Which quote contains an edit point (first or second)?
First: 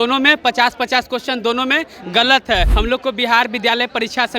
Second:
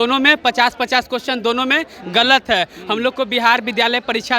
first